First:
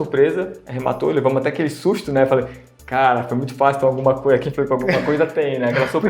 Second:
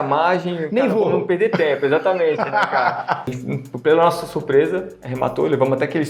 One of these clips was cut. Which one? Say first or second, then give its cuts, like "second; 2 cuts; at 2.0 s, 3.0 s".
second; 1 cut; at 3.3 s